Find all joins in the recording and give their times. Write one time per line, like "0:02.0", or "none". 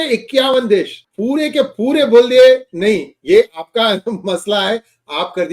0:01.0

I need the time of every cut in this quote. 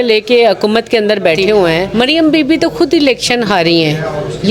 0:01.9

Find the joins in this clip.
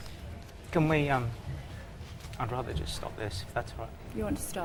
none

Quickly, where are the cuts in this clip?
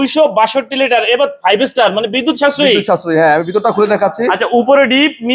none

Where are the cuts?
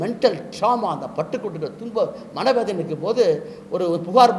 none

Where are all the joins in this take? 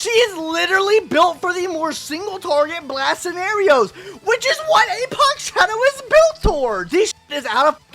0:06.8

